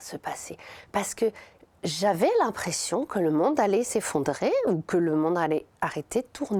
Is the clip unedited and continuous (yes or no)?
yes